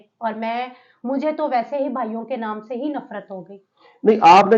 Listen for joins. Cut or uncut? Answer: uncut